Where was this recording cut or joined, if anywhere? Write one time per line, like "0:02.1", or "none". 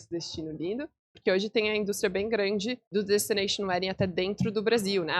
0:01.1
0:02.8